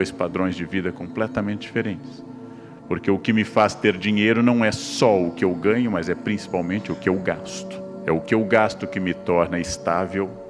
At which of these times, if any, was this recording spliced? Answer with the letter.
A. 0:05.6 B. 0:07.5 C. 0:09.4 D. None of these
B